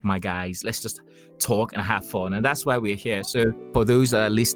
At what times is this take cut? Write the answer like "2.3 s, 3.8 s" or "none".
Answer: 3.7 s